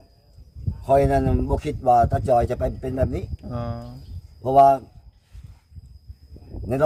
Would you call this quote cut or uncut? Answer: uncut